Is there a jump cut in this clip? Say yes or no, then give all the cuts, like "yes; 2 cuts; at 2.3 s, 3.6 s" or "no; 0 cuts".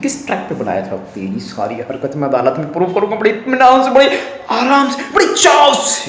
no; 0 cuts